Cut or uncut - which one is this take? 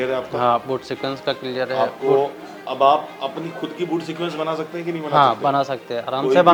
uncut